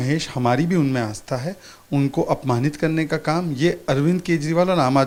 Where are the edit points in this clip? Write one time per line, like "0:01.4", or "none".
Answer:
none